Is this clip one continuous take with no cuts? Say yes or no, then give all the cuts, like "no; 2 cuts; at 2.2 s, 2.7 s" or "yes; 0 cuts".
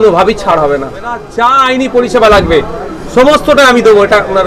no; 1 cut; at 1.3 s